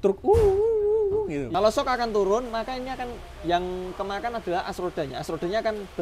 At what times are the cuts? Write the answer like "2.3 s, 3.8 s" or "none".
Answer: 1.4 s

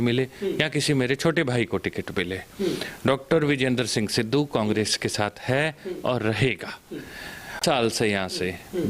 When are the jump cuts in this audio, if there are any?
7.6 s

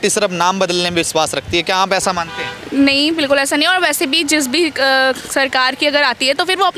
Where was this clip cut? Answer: none

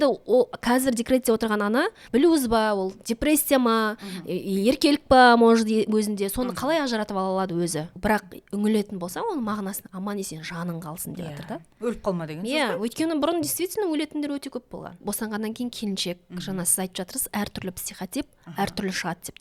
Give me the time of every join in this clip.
2.0 s, 7.9 s, 15.0 s

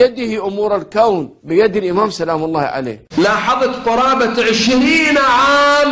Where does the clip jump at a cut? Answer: none

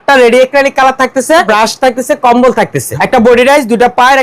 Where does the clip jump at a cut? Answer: 1.5 s, 2.8 s

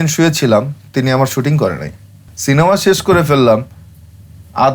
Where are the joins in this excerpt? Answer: 2.3 s

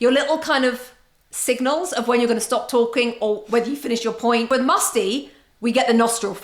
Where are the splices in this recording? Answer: 4.5 s

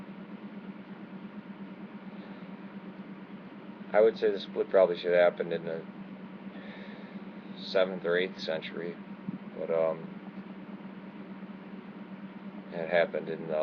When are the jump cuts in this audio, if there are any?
none

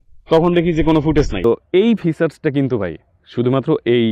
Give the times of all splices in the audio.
1.4 s

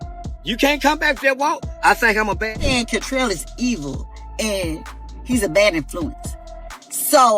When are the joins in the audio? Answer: 2.6 s

